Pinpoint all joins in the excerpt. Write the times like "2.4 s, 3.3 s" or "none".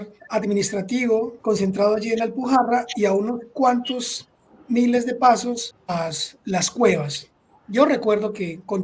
1.3 s, 5.7 s